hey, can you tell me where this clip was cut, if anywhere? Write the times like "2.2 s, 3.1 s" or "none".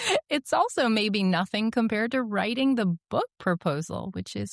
none